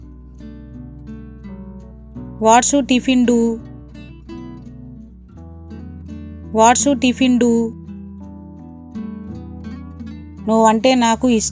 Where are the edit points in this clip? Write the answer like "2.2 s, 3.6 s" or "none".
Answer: none